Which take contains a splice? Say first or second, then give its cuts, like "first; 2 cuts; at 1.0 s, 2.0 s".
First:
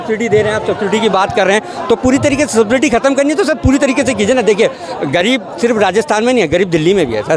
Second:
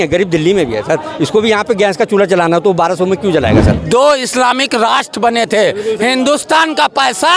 second; 1 cut; at 3.8 s